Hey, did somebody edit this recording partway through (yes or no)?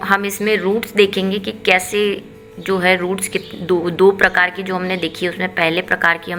no